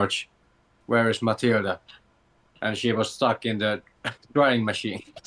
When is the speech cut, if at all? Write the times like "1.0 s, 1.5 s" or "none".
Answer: none

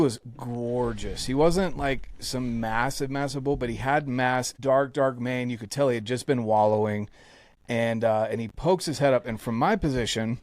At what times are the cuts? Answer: 4.5 s

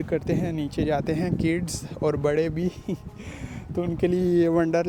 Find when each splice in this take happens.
none

